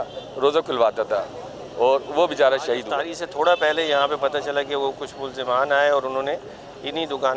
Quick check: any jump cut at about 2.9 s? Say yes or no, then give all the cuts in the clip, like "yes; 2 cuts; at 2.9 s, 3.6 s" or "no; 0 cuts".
yes; 1 cut; at 2.9 s